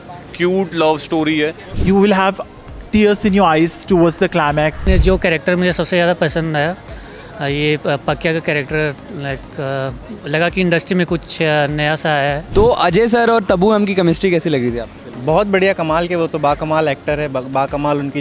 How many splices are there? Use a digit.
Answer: 3